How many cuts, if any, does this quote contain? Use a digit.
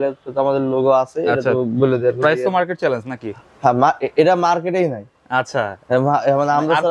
0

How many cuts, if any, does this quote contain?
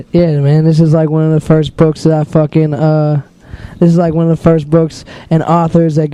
0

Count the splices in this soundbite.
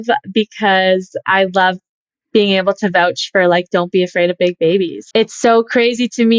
1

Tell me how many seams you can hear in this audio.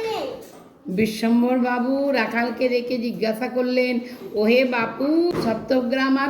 1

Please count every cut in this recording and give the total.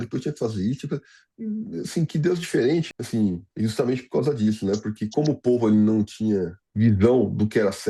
3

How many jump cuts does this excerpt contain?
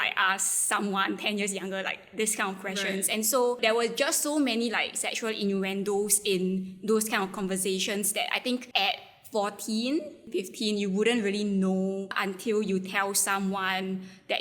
4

